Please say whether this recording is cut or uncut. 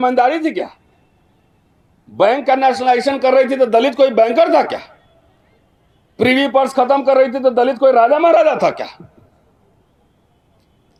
uncut